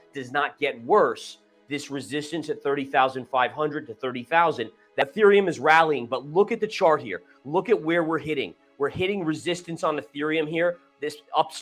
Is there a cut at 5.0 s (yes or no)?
yes